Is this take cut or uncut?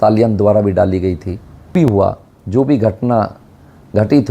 cut